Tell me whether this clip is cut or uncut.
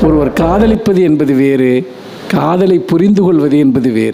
uncut